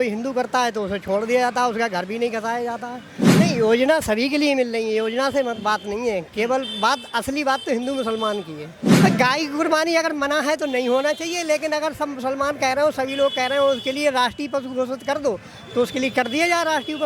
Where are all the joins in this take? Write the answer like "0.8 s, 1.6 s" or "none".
3.4 s, 9.0 s